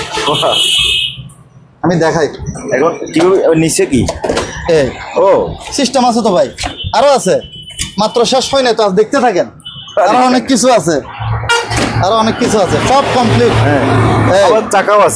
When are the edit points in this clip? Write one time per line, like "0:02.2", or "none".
none